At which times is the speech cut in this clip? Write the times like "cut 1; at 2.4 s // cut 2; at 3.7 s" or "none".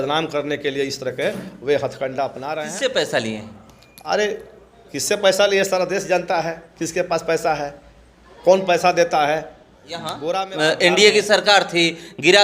cut 1; at 2.5 s // cut 2; at 10.2 s